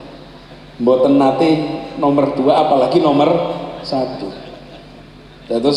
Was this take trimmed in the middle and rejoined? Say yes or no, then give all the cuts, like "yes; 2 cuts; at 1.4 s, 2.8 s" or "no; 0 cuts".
no; 0 cuts